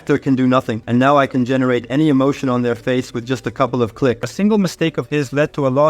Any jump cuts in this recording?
yes; 1 cut; at 4.3 s

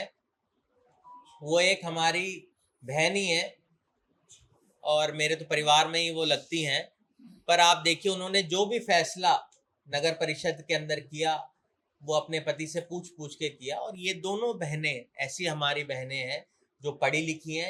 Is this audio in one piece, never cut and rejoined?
yes; 0 cuts

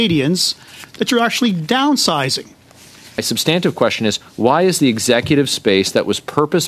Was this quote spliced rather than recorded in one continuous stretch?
yes; 1 cut; at 3.2 s

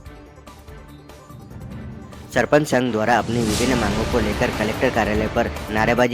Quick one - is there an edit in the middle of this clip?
yes; 2 cuts; at 1.3 s, 2.2 s

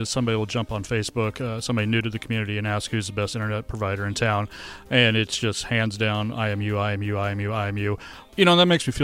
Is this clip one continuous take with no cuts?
no; 1 cut; at 8.1 s

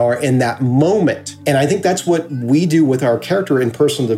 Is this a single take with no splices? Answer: no; 1 cut; at 1.3 s

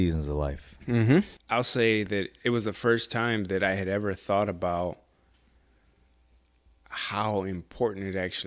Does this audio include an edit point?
yes; 1 cut; at 1.4 s

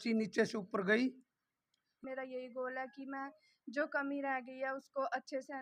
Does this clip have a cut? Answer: yes; 1 cut; at 2.0 s

